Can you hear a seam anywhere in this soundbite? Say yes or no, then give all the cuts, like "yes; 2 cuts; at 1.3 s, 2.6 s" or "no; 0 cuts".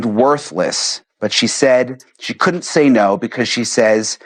no; 0 cuts